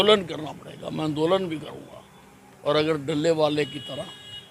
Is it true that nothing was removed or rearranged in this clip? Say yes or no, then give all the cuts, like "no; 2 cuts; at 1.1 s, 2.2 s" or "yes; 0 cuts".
yes; 0 cuts